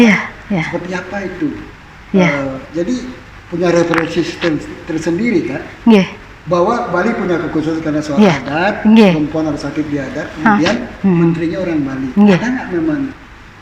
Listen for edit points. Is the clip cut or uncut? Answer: uncut